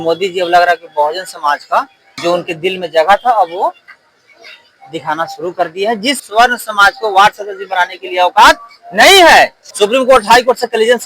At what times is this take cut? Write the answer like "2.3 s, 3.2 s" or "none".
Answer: 2.0 s, 6.2 s, 9.6 s